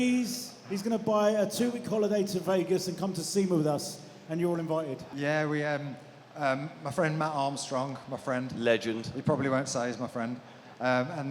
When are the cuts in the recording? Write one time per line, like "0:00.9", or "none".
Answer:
0:05.1